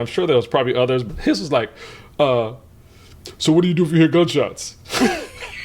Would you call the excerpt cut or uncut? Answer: cut